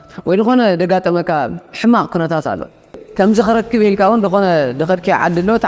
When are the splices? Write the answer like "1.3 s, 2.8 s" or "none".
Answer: 3.0 s